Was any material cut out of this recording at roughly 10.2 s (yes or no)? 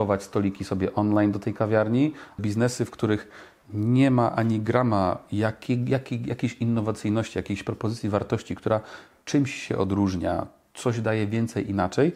no